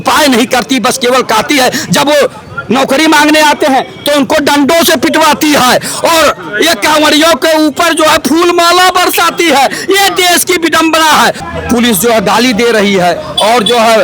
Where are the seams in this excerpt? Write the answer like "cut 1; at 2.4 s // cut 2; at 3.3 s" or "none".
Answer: cut 1; at 11.4 s